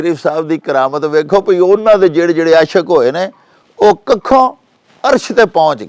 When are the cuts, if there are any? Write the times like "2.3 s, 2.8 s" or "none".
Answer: none